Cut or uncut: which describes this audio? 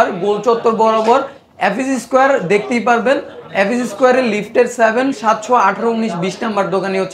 uncut